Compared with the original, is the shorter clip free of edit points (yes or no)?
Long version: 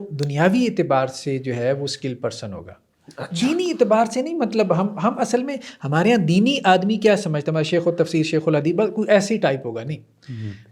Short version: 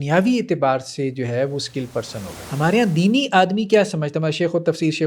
no